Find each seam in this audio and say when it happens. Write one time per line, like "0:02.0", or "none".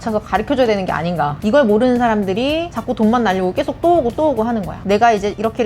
0:01.3
0:02.7
0:04.7